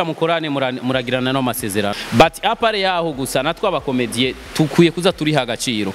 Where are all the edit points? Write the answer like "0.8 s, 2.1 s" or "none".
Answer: 1.9 s